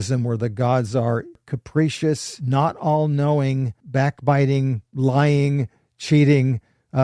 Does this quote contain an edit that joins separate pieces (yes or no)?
yes